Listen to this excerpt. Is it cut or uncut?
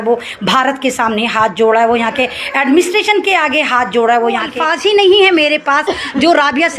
cut